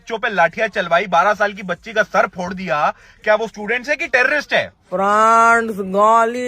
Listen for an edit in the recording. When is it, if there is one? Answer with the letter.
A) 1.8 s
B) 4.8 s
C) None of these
B